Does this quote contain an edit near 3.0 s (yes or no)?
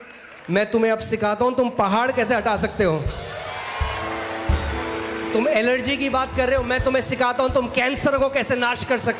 no